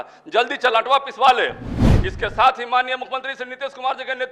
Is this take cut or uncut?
cut